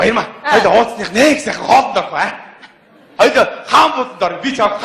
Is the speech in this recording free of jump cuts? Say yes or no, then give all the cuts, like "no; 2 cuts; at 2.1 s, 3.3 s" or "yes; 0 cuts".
no; 1 cut; at 1.1 s